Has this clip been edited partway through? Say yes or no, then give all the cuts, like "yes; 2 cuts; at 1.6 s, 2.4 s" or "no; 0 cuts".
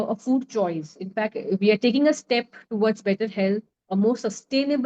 yes; 1 cut; at 3.8 s